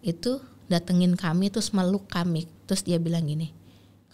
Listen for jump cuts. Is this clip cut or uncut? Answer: cut